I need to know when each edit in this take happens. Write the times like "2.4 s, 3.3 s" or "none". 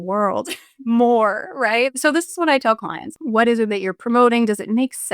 1.9 s, 3.1 s